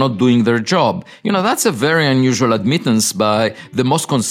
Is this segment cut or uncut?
uncut